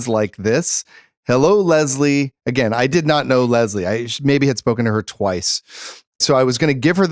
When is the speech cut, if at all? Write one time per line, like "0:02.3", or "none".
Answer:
0:02.9
0:06.2

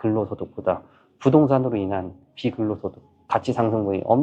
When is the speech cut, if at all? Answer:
none

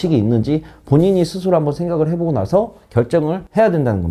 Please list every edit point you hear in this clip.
none

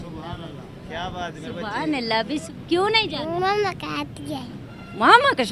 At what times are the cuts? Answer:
0:02.4

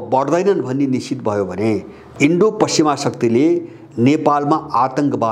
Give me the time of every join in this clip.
0:02.0

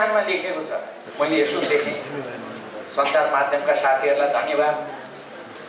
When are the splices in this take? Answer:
0:01.0

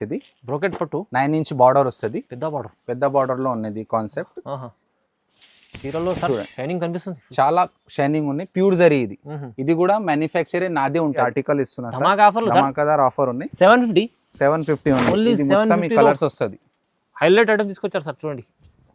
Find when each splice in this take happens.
0:11.2

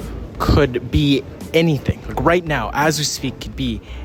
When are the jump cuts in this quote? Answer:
none

